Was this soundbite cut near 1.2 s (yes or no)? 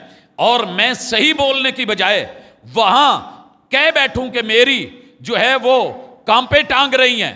no